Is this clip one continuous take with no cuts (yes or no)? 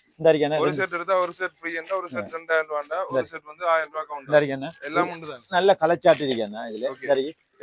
yes